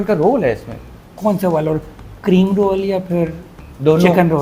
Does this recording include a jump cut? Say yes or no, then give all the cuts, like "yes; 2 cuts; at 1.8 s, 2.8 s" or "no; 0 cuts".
yes; 1 cut; at 1.1 s